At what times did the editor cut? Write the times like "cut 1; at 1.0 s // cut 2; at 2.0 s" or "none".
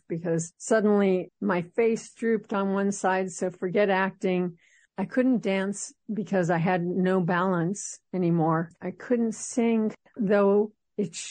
cut 1; at 8.7 s // cut 2; at 9.9 s